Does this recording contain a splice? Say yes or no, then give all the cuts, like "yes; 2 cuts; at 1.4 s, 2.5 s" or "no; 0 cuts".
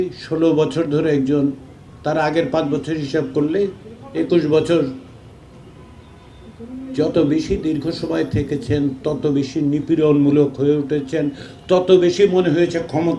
no; 0 cuts